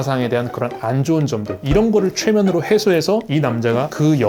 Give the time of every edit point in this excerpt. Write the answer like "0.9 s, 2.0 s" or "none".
1.6 s